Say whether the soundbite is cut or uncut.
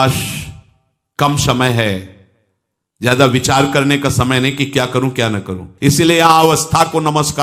cut